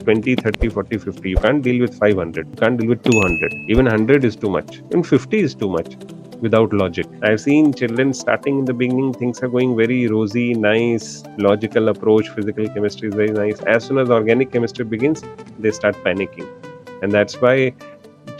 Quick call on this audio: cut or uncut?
cut